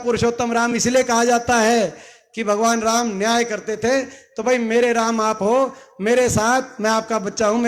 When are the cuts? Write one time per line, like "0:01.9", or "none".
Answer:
none